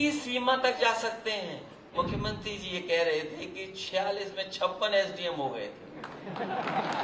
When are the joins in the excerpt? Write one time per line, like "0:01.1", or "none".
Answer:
0:01.9